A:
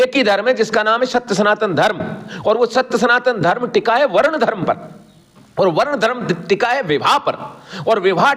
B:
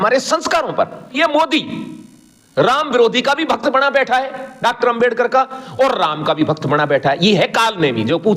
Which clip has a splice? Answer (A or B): B